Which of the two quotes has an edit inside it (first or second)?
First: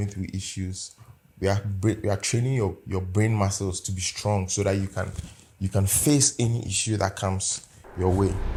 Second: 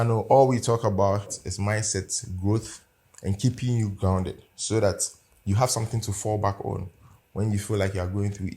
second